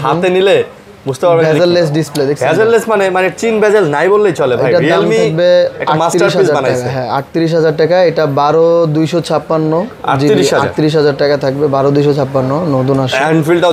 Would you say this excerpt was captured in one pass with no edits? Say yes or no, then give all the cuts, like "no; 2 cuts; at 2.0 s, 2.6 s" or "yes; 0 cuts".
yes; 0 cuts